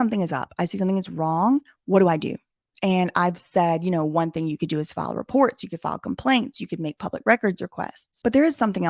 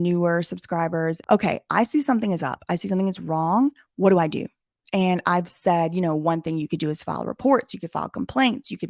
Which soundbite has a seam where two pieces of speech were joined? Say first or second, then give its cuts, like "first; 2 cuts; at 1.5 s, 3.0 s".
second; 1 cut; at 1.2 s